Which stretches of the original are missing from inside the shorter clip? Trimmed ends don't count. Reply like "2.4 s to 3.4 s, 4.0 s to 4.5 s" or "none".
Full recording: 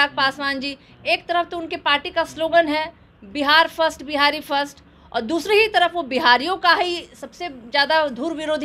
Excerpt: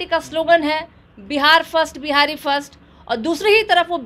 none